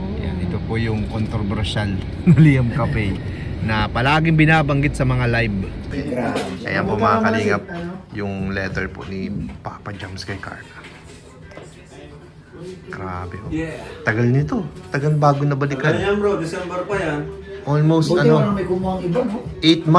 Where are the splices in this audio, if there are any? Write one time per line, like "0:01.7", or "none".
0:05.9